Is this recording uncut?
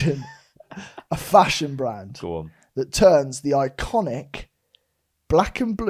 yes; 0 cuts

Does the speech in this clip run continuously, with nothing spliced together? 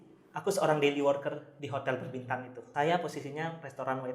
no; 1 cut; at 2.6 s

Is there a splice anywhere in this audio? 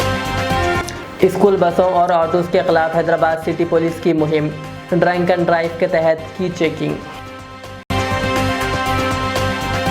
no; 0 cuts

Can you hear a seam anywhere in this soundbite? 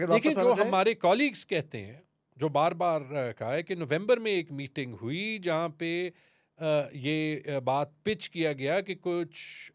no; 0 cuts

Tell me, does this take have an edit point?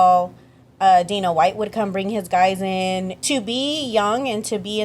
yes; 1 cut; at 3.1 s

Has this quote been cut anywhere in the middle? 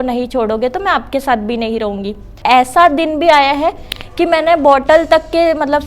yes; 1 cut; at 2.4 s

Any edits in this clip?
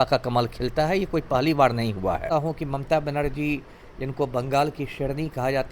yes; 1 cut; at 2.3 s

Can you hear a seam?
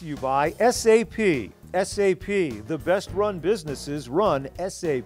no; 0 cuts

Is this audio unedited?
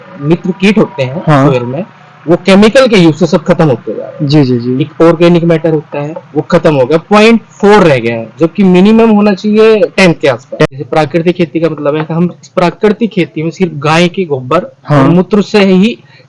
no; 1 cut; at 10.7 s

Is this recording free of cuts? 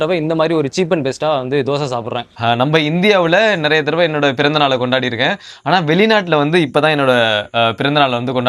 no; 1 cut; at 2.2 s

